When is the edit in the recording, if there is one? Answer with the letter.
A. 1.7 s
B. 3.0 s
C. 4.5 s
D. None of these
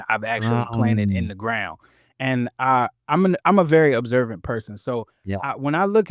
D